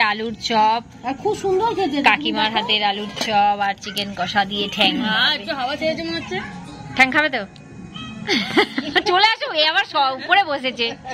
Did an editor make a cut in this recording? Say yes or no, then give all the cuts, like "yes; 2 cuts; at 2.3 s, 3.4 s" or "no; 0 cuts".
no; 0 cuts